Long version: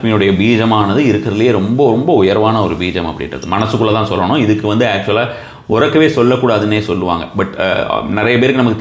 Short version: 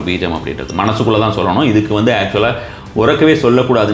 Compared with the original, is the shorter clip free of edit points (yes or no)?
yes